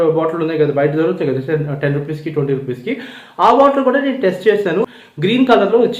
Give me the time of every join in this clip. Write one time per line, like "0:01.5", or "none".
0:04.9